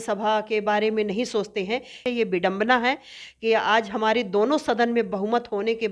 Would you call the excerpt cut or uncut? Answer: cut